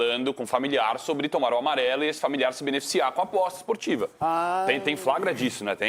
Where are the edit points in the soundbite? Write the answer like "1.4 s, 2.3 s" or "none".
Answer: none